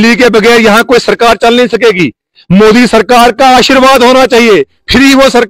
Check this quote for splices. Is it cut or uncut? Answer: uncut